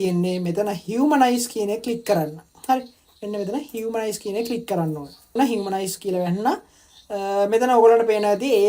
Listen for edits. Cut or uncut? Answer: cut